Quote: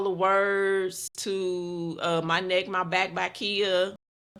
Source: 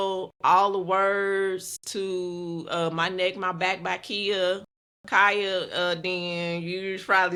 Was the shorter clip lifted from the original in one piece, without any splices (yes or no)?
yes